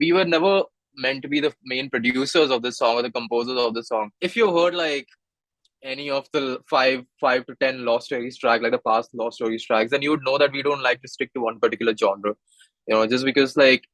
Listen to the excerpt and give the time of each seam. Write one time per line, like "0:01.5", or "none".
0:04.2